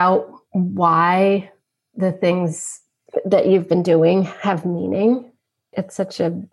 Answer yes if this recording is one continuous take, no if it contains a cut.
no